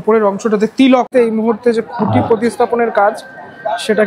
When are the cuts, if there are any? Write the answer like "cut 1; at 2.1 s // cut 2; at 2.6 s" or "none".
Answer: cut 1; at 1.1 s